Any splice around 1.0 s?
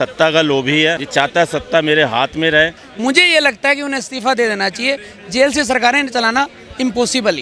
yes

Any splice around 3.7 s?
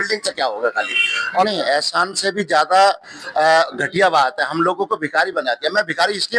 no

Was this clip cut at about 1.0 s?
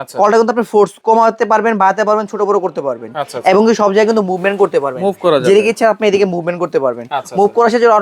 yes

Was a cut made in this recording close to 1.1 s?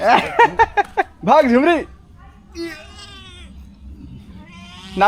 no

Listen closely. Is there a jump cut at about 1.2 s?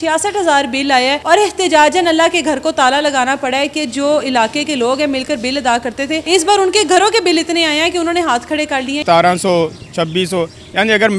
yes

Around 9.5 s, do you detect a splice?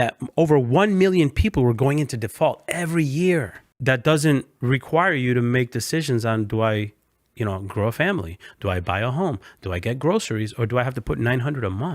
no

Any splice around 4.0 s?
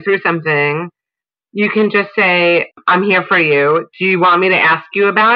no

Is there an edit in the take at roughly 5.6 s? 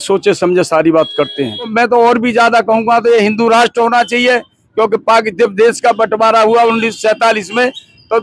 no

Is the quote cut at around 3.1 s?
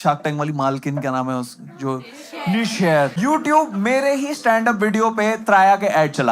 yes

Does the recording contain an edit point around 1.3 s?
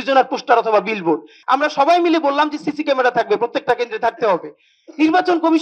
yes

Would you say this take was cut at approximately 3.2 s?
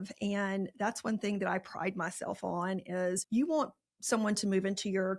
yes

